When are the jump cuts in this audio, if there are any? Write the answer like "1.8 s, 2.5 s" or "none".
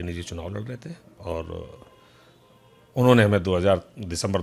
none